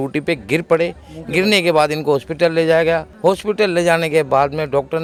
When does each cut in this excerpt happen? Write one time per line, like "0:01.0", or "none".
none